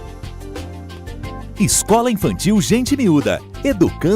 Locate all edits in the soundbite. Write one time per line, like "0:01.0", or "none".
0:01.5